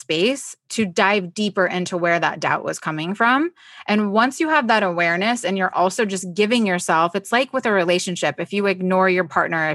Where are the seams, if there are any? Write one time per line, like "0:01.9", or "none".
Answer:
none